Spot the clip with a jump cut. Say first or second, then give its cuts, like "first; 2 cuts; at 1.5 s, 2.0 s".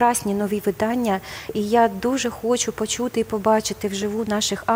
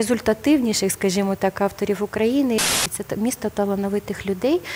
second; 1 cut; at 2.7 s